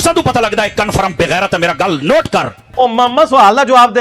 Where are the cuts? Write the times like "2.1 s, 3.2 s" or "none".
2.6 s